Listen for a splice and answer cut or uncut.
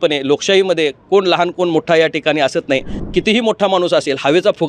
cut